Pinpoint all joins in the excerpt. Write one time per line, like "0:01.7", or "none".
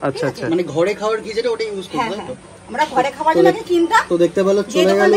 none